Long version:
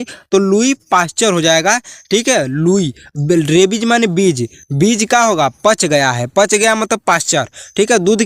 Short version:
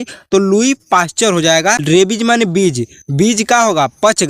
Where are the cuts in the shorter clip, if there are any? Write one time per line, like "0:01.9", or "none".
0:01.8